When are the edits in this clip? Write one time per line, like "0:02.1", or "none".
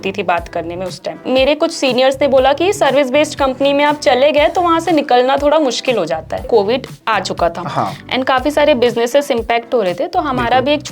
0:01.2
0:06.4

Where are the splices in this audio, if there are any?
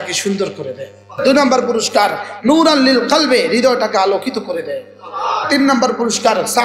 0:01.2
0:05.4

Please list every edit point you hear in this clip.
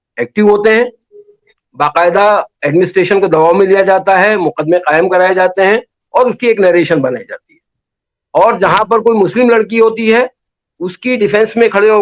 none

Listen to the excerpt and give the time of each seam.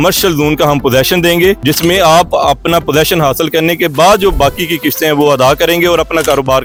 none

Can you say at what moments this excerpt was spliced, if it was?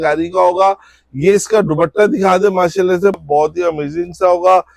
0:03.2

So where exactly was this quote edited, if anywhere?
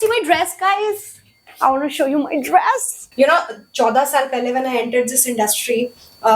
0:03.0

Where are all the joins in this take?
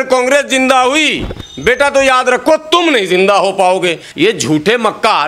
0:04.0

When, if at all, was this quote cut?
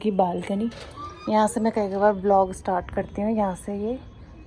none

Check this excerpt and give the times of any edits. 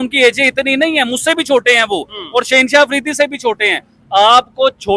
none

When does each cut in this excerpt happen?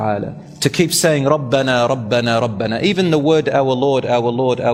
none

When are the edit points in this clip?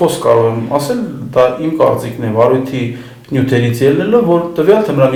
none

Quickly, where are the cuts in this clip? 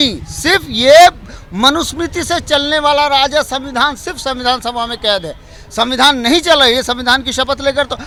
none

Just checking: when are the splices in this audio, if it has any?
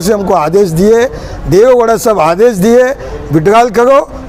none

